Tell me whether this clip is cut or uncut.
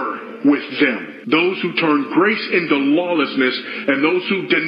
uncut